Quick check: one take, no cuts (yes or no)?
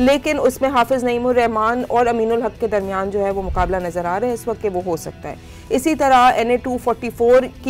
yes